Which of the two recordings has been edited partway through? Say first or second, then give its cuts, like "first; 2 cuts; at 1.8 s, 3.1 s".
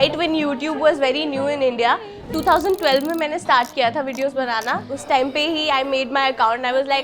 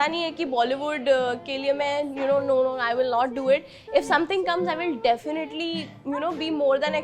first; 1 cut; at 4.9 s